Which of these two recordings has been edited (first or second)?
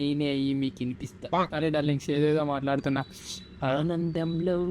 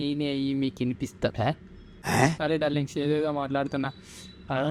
first